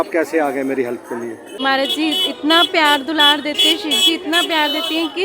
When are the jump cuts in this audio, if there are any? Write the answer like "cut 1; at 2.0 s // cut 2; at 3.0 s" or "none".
cut 1; at 1.5 s